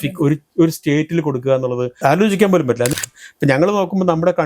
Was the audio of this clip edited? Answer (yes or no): yes